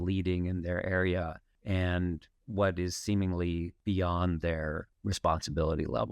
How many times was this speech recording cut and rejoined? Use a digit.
3